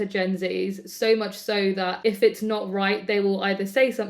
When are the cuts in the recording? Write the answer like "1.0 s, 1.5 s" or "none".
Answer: 1.9 s